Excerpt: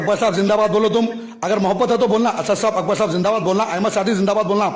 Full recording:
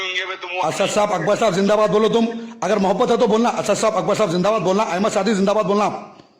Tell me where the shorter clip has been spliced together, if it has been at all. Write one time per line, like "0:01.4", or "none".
none